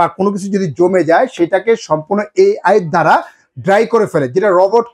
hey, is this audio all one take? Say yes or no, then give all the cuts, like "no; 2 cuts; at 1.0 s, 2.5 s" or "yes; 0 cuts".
yes; 0 cuts